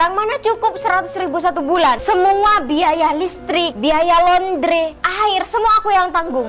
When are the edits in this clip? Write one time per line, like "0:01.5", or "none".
0:02.0
0:03.7
0:05.0